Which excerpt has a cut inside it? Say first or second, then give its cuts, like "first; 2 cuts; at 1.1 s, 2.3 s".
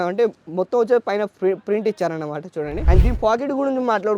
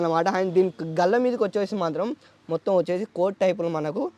first; 1 cut; at 2.8 s